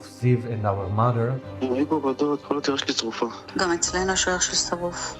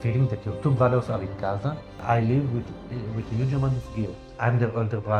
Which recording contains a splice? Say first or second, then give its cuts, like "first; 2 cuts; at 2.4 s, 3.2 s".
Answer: second; 2 cuts; at 1.9 s, 4.2 s